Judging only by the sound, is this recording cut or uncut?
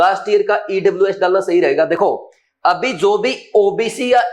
uncut